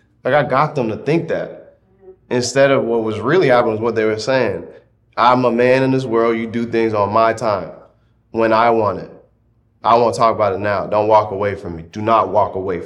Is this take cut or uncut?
uncut